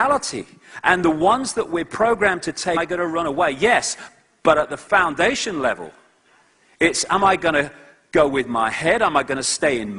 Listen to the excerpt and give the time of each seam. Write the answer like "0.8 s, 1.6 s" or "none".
none